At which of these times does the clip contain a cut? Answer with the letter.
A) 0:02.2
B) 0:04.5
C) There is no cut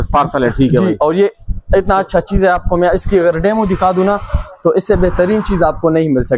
C